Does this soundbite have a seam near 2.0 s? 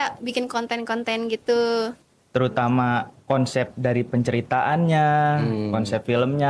yes; 1 cut; at 2.0 s

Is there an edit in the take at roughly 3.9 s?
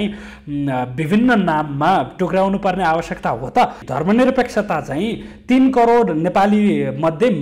yes; 1 cut; at 3.9 s

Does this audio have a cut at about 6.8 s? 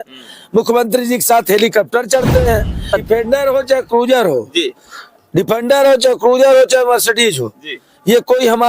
no; 1 cut; at 2.8 s

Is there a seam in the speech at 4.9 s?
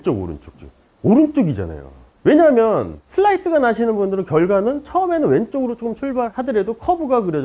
no; 0 cuts

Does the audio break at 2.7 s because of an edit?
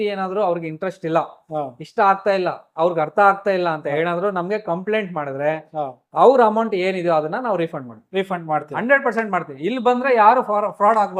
no; 0 cuts

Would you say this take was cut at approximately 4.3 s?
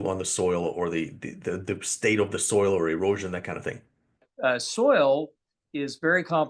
yes; 1 cut; at 4.3 s

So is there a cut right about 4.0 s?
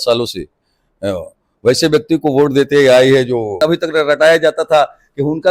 yes; 1 cut; at 4.0 s

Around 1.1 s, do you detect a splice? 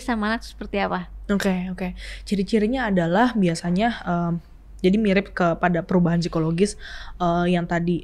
no; 0 cuts

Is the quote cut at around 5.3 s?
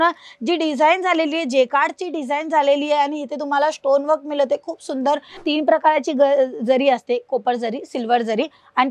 yes; 1 cut; at 5.3 s

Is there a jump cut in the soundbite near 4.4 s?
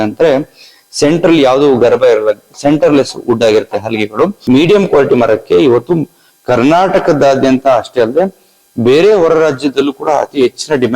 yes; 1 cut; at 4.4 s

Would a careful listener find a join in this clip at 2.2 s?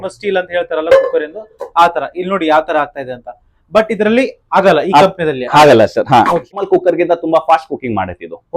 no; 1 cut; at 6.5 s

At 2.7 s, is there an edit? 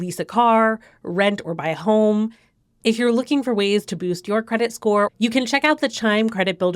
no; 1 cut; at 5.1 s

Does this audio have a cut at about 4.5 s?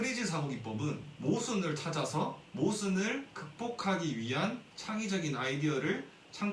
no; 2 cuts; at 1.1 s, 2.4 s

